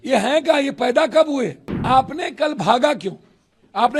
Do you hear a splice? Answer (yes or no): yes